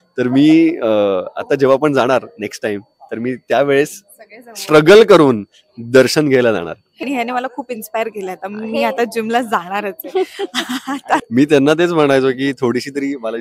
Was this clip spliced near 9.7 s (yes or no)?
no